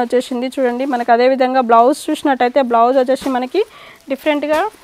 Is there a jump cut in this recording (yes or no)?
no